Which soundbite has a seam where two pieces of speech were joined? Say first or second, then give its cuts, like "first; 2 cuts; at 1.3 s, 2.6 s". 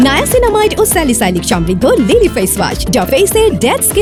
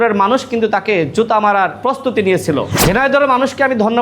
second; 2 cuts; at 1.8 s, 2.7 s